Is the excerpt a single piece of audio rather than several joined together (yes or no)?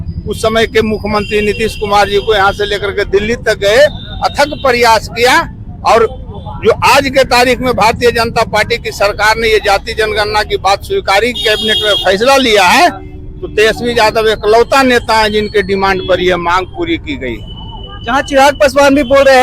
yes